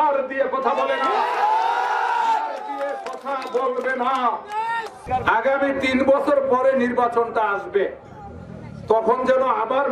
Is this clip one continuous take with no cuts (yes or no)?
no